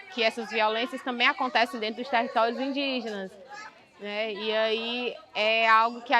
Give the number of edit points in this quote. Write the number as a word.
zero